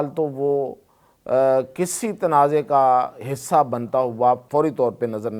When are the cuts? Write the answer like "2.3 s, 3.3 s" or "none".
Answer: 4.4 s